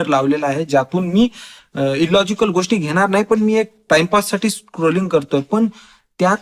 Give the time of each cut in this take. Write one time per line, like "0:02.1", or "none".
none